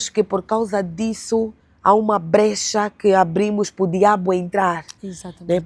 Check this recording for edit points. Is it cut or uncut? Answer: uncut